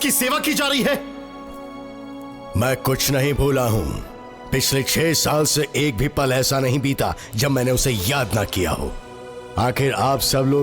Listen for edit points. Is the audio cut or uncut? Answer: uncut